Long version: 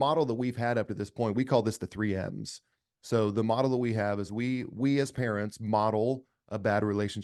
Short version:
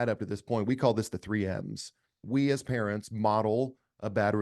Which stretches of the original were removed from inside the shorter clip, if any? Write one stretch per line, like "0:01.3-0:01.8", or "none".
0:02.9-0:04.7